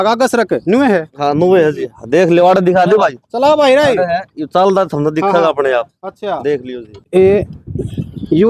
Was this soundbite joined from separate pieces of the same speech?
yes; 1 cut; at 6.9 s

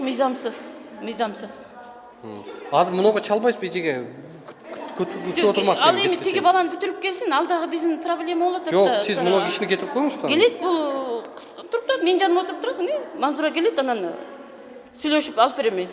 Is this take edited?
no; 0 cuts

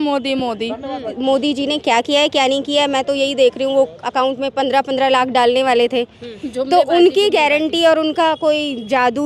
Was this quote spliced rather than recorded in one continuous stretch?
yes; 1 cut; at 1.1 s

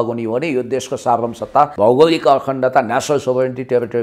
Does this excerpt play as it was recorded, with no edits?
no; 1 cut; at 1.7 s

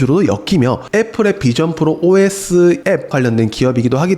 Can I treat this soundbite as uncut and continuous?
no; 1 cut; at 3.1 s

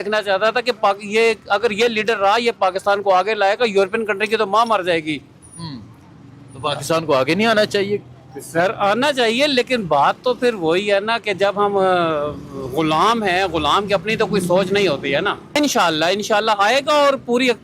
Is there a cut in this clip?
yes; 1 cut; at 15.6 s

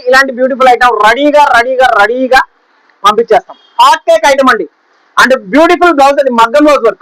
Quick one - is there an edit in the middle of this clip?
no; 0 cuts

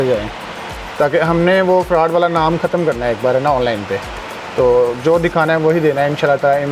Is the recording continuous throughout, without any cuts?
yes; 0 cuts

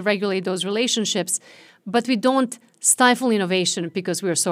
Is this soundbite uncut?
yes; 0 cuts

